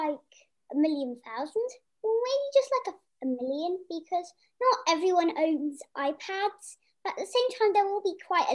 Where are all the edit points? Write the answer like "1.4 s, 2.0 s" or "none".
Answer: 1.8 s, 3.0 s